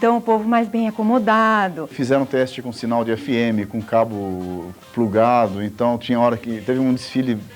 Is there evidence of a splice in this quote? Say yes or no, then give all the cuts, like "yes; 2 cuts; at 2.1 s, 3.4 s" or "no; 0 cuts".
yes; 1 cut; at 1.9 s